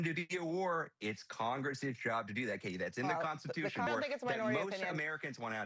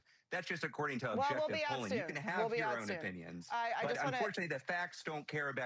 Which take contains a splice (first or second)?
first